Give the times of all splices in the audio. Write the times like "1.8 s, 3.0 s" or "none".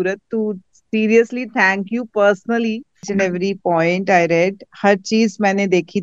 3.0 s